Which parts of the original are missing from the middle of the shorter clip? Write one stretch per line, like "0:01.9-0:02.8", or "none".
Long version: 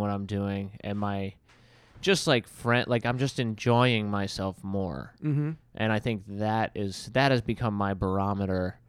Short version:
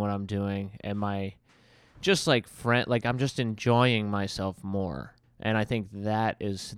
0:05.2-0:05.5

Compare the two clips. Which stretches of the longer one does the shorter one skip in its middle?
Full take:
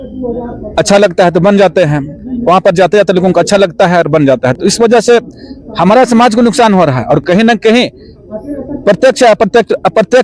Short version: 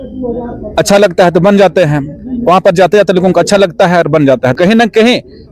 0:04.6-0:07.2

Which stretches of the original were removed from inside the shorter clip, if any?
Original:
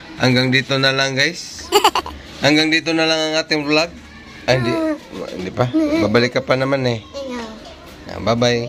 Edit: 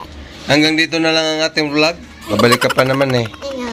0:04.3-0:06.0

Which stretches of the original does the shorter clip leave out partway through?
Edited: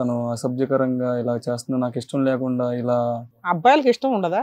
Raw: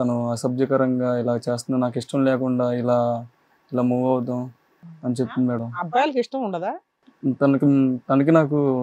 0:03.5-0:05.8

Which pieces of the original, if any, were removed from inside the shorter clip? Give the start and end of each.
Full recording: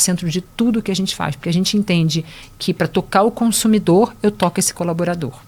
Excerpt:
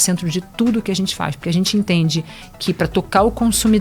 none

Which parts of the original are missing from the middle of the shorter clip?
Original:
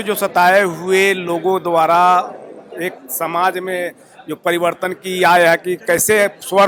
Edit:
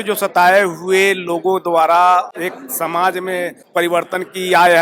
0:02.3-0:02.7
0:04.0-0:04.3

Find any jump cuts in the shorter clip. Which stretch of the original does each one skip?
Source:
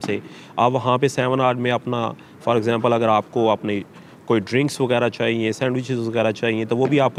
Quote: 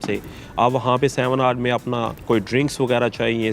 0:02.1-0:04.1

